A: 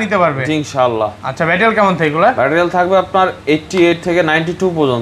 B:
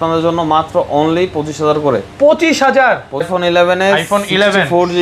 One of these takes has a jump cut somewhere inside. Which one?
B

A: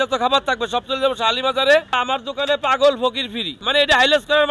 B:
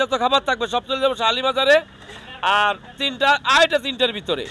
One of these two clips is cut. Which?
A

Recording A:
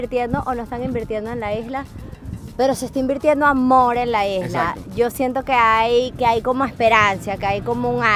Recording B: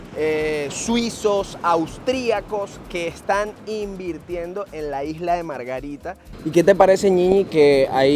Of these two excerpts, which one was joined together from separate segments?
B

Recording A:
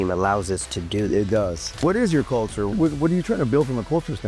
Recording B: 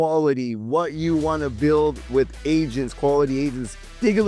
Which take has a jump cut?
A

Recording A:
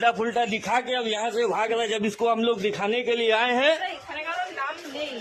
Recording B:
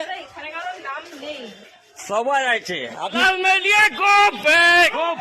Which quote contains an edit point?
B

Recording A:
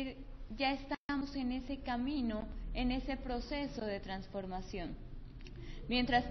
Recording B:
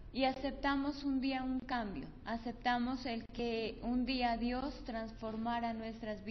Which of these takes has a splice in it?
A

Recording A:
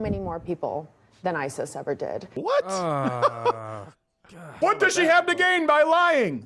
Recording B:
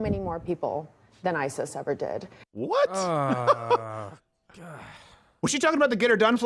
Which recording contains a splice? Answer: A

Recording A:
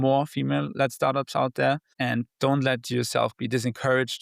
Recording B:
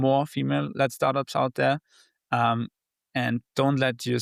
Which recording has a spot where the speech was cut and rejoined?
A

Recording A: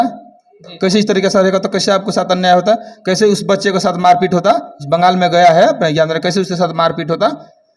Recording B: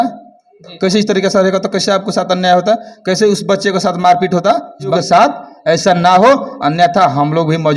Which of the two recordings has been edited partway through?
B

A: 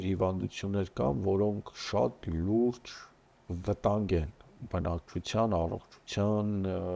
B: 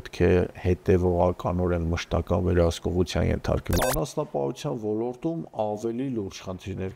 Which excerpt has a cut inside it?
B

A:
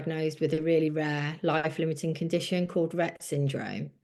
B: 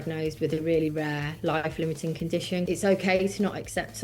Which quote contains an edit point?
B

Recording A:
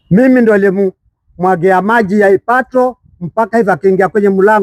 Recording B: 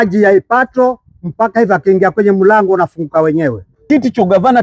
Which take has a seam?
B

